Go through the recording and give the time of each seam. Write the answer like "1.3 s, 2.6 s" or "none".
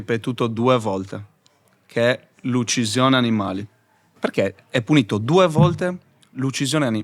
4.1 s